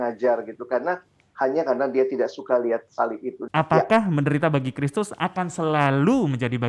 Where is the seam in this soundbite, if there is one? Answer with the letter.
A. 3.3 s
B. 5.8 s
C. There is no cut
A